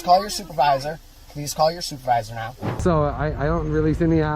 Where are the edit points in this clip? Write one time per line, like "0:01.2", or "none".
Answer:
0:02.6